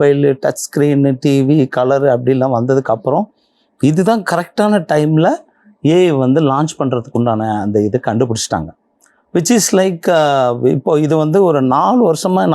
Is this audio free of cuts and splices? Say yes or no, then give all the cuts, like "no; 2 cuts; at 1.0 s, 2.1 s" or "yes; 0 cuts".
yes; 0 cuts